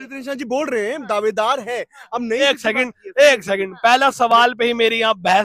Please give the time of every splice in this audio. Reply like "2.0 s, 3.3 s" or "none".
2.4 s